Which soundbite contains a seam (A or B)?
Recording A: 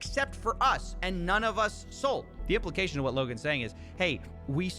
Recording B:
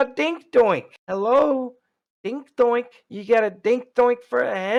A